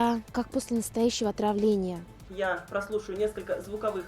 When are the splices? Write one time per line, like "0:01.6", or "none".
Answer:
0:02.2